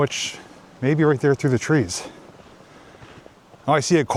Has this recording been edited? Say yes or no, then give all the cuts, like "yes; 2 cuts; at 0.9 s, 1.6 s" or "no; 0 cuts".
no; 0 cuts